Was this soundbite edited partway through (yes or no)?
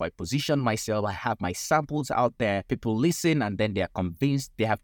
yes